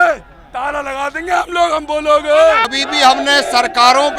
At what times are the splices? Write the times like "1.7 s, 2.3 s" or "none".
2.7 s